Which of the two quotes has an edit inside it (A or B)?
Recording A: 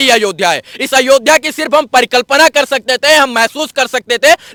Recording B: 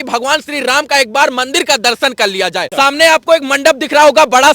B